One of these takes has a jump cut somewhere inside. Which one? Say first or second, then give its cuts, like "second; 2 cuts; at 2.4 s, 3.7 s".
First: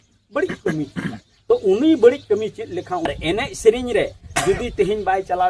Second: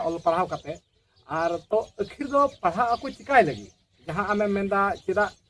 first; 1 cut; at 3.1 s